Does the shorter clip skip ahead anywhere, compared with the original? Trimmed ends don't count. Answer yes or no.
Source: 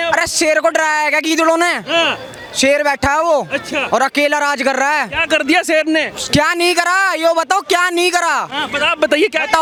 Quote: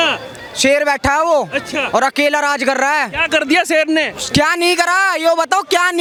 no